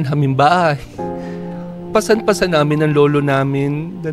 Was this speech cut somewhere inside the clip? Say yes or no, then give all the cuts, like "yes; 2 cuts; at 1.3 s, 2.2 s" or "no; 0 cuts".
no; 0 cuts